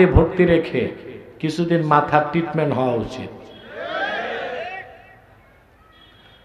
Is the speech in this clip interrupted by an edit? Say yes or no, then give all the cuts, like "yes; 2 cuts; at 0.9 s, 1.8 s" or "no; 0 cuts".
no; 0 cuts